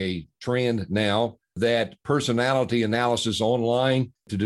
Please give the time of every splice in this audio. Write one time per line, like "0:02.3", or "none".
0:01.4